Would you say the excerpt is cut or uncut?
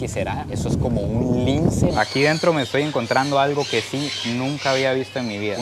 cut